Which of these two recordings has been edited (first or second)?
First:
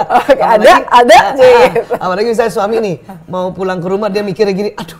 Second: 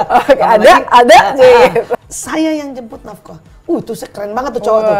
second